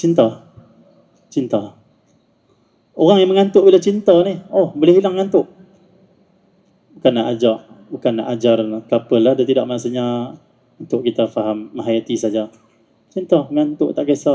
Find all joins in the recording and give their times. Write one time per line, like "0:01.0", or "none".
none